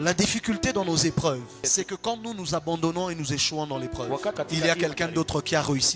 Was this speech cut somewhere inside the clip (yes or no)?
yes